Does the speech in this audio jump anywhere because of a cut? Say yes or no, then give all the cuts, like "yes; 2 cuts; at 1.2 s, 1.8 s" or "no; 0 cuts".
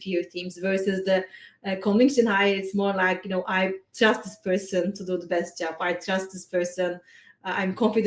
no; 0 cuts